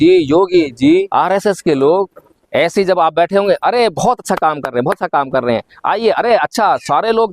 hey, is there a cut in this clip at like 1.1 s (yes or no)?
yes